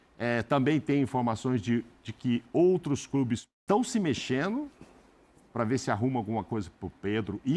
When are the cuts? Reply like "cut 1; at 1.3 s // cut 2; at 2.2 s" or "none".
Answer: cut 1; at 3.5 s